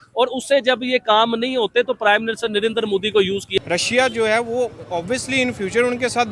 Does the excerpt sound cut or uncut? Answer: cut